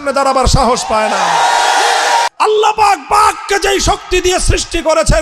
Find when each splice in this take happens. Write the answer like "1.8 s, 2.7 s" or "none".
2.3 s